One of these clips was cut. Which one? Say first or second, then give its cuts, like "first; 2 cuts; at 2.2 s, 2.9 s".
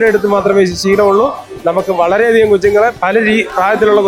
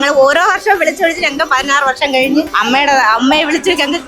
second; 1 cut; at 2.5 s